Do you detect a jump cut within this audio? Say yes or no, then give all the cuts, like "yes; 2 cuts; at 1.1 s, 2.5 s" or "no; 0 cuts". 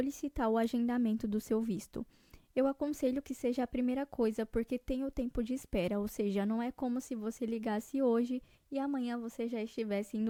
no; 0 cuts